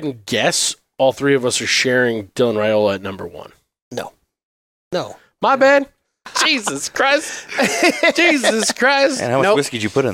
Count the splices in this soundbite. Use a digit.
2